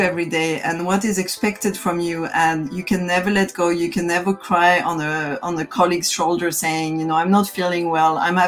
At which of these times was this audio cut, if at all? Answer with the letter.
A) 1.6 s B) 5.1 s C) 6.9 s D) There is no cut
D